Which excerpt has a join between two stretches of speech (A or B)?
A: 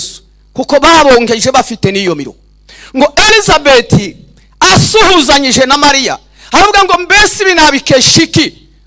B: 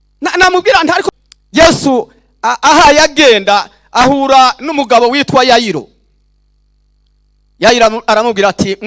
B